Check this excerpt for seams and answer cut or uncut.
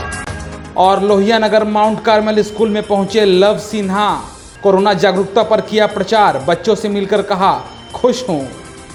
uncut